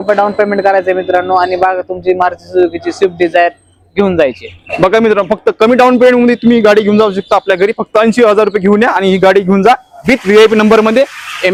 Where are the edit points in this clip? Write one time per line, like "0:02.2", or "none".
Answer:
none